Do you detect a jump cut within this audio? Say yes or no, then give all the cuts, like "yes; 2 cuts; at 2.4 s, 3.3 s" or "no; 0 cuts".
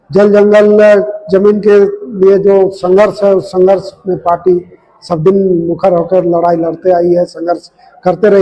no; 0 cuts